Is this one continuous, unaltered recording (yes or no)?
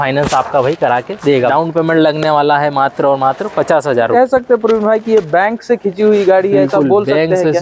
no